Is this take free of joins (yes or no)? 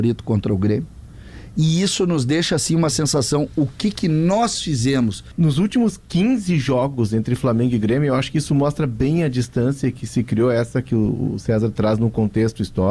no